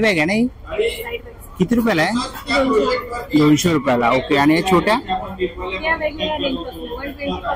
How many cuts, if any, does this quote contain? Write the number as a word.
zero